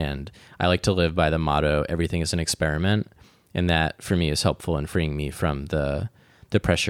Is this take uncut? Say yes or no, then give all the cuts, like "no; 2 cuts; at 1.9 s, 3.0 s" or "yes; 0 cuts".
yes; 0 cuts